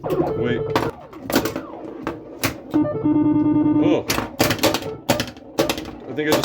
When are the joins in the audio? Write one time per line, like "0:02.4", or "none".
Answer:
0:00.9